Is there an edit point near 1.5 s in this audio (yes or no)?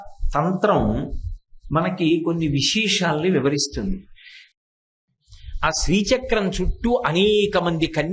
no